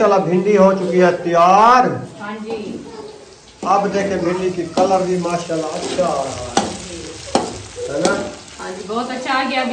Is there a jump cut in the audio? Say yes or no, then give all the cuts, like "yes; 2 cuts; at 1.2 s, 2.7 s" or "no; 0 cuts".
no; 0 cuts